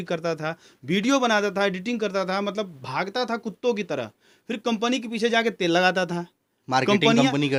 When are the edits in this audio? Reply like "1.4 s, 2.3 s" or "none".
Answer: none